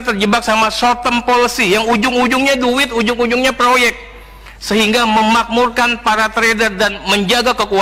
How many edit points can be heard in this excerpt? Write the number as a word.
zero